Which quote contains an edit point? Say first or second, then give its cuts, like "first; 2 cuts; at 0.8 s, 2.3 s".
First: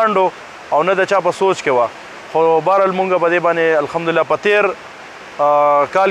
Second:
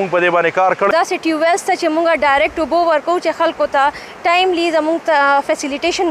second; 1 cut; at 0.9 s